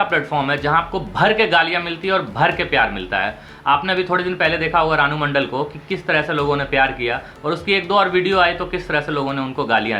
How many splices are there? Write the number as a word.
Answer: zero